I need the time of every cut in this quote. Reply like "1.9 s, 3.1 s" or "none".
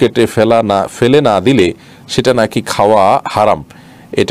none